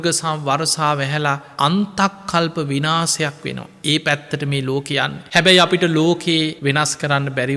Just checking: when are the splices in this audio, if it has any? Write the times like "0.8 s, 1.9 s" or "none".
5.2 s, 6.6 s